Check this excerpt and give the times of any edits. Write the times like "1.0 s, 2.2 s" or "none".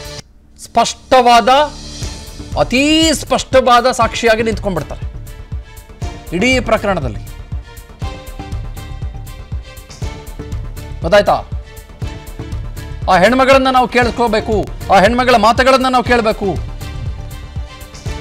none